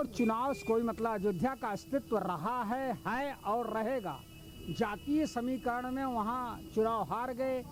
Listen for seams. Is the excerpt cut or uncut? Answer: uncut